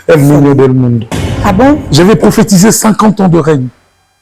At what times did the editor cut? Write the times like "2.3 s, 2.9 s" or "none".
1.2 s